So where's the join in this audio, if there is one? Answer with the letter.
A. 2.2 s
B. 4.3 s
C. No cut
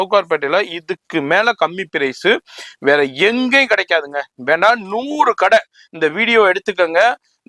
C